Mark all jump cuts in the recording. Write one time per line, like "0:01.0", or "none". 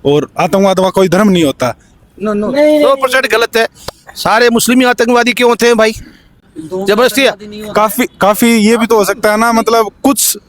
none

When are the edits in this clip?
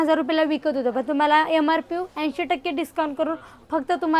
none

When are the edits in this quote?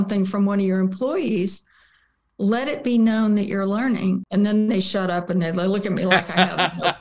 0:04.2

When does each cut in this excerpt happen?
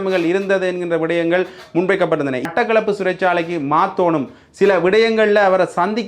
0:02.4

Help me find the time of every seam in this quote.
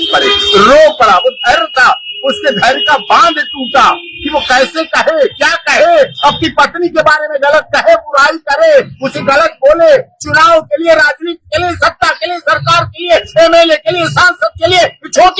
none

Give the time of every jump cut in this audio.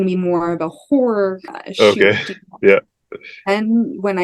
0:01.5

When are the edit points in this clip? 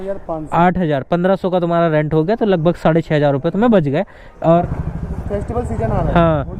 0:04.7

